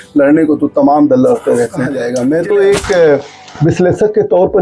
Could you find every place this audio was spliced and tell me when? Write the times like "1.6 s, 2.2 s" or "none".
2.0 s